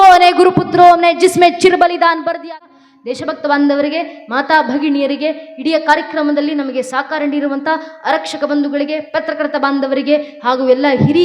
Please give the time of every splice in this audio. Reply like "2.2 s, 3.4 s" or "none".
2.5 s